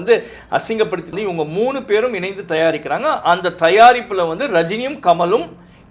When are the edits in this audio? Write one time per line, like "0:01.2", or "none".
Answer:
0:01.1